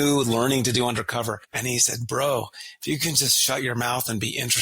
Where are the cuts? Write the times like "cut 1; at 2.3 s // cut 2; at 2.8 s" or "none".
cut 1; at 1.5 s